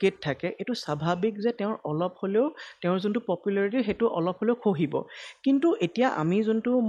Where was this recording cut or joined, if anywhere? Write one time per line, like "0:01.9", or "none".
none